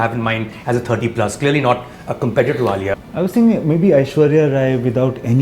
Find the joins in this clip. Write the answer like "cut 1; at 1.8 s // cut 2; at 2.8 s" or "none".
cut 1; at 2.9 s